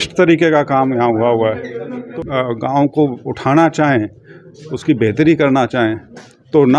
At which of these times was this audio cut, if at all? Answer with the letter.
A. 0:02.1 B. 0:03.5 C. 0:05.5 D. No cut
A